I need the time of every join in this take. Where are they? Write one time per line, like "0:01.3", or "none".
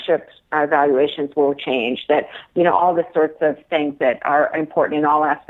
none